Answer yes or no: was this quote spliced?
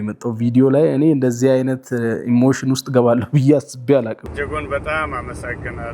yes